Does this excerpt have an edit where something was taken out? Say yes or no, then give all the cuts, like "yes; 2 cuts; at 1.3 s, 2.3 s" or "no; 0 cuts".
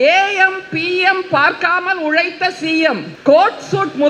yes; 1 cut; at 3.1 s